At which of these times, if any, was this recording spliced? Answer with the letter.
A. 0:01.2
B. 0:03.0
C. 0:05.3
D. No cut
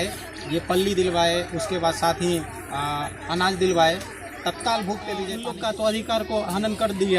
C